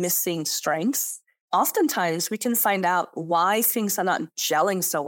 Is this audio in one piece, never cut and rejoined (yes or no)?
no